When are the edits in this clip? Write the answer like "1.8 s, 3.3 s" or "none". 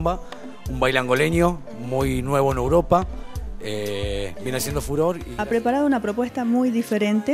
5.3 s

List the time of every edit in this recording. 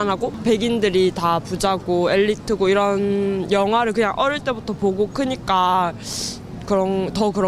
none

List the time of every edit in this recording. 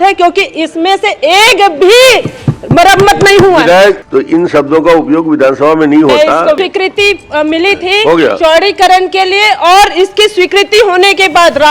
4.0 s, 6.6 s

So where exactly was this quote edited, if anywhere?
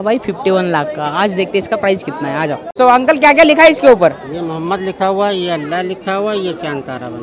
none

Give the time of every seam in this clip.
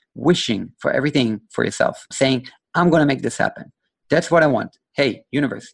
2.1 s

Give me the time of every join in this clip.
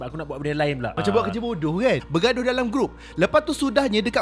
2.0 s

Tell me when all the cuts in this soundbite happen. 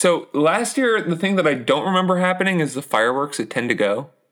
none

